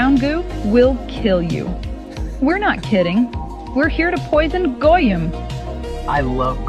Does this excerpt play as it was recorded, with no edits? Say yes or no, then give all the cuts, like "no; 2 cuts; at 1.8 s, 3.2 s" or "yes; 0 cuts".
yes; 0 cuts